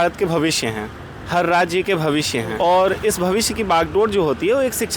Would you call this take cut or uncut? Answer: cut